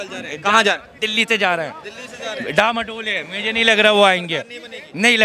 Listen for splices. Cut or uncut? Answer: uncut